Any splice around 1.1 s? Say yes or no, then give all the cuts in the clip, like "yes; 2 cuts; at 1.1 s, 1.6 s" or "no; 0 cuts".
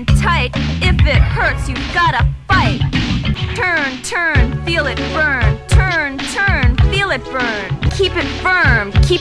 no; 2 cuts; at 3.4 s, 7.9 s